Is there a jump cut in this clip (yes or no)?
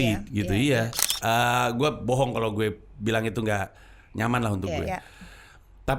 yes